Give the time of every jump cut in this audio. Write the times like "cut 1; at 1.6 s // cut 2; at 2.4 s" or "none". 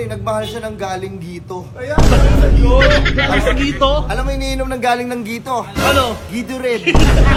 none